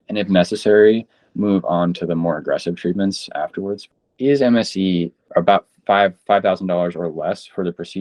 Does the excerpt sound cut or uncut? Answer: cut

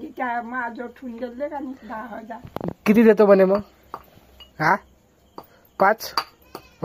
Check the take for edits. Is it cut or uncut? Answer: uncut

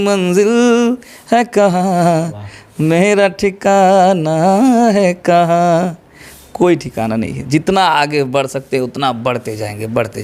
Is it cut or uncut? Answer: uncut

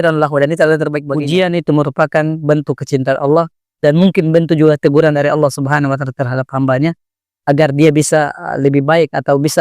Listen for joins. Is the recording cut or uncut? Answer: cut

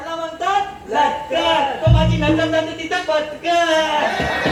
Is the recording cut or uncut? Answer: uncut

